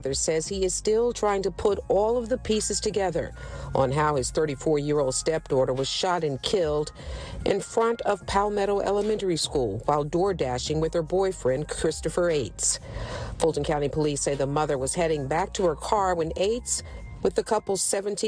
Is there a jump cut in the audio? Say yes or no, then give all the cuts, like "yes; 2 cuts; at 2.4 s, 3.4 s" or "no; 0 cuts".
yes; 2 cuts; at 7.0 s, 12.6 s